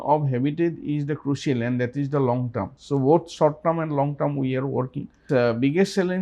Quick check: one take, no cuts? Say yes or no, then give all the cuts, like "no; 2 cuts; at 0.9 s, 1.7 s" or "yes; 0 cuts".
no; 2 cuts; at 2.7 s, 5.2 s